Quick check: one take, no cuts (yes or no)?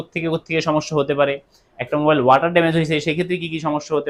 yes